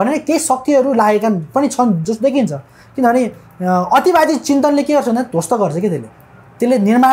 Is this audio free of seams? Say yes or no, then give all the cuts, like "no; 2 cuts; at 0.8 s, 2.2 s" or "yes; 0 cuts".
yes; 0 cuts